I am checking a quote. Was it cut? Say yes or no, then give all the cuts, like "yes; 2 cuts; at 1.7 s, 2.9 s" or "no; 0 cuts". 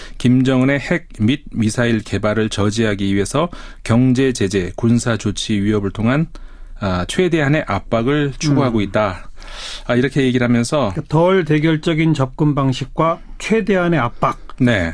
yes; 1 cut; at 1.0 s